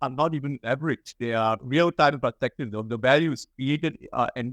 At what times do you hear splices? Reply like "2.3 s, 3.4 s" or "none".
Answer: none